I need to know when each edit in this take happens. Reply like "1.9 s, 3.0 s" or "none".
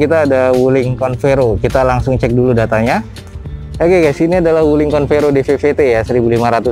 none